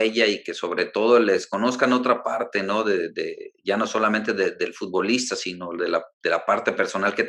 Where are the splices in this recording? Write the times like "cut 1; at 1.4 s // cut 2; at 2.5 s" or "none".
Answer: none